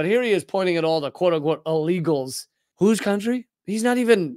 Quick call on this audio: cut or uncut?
cut